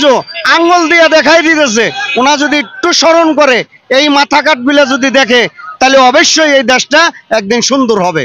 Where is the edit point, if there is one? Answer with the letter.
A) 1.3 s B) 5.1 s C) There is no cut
C